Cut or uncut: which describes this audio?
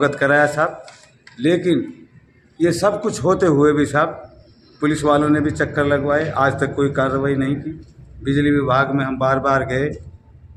uncut